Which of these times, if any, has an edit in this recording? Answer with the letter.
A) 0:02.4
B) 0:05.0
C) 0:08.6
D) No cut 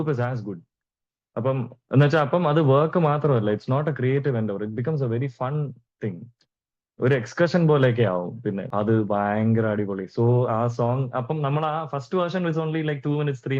C